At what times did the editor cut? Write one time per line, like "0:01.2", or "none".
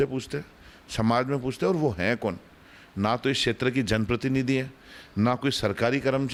none